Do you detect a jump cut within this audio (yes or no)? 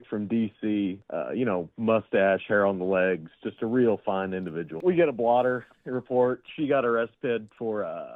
yes